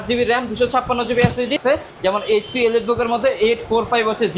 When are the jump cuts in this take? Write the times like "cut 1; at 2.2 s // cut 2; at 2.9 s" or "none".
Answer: cut 1; at 1.6 s